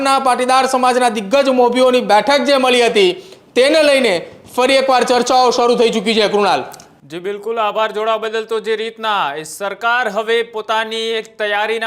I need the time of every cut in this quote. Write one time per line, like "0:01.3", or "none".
none